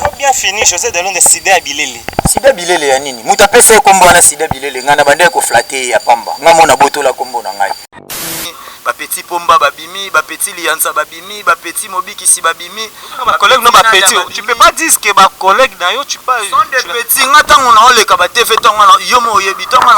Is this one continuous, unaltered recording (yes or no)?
no